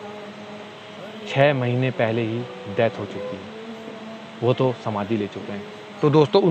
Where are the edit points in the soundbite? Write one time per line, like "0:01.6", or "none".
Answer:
none